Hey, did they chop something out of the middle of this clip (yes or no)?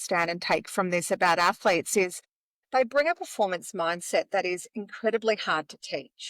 no